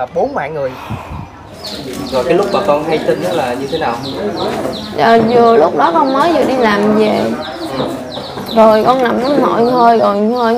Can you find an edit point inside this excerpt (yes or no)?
yes